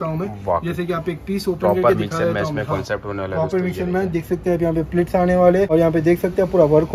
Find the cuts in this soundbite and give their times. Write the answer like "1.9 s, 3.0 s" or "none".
5.7 s